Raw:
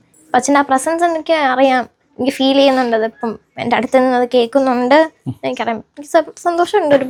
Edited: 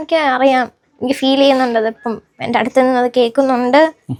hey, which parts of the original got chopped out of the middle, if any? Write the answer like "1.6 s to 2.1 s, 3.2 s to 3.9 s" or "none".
none